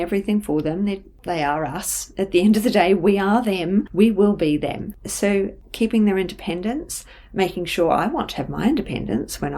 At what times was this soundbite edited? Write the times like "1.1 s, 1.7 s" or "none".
3.9 s